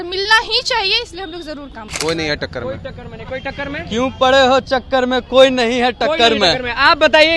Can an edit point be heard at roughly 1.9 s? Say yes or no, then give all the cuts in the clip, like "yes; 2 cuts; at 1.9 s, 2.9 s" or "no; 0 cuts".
yes; 1 cut; at 1.9 s